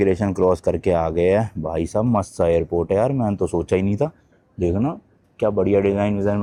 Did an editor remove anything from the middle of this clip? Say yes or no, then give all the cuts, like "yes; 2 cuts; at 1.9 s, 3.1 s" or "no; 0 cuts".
no; 0 cuts